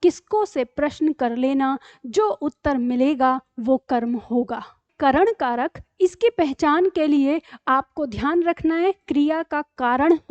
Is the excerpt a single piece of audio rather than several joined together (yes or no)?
no